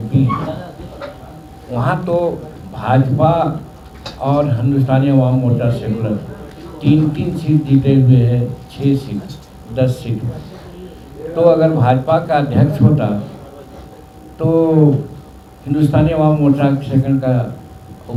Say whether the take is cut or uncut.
uncut